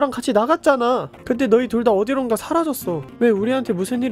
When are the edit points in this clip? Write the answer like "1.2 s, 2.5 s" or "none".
1.1 s, 3.1 s